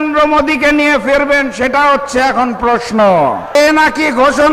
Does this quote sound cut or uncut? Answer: cut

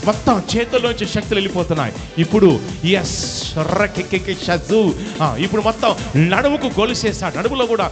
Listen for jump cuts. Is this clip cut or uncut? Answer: uncut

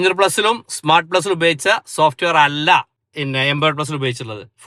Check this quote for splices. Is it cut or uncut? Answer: cut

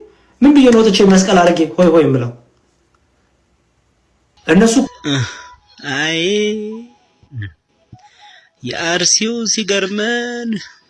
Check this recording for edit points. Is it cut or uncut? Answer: cut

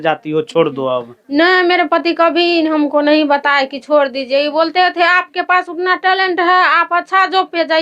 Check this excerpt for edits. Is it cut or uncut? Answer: uncut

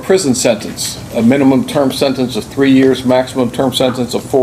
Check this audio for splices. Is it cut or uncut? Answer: uncut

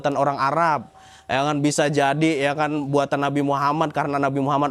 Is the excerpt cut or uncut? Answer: uncut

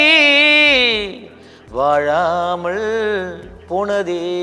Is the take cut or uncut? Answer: uncut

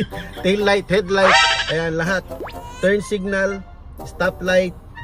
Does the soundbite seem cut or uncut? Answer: uncut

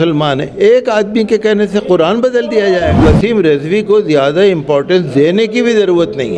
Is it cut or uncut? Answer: cut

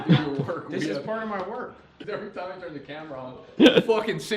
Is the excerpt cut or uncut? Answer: cut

